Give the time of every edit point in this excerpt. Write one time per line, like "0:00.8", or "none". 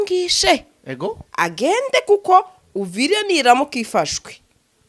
none